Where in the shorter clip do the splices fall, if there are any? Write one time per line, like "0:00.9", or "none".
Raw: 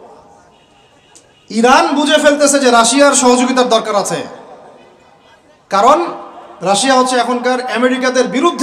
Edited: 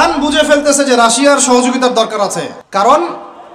0:02.6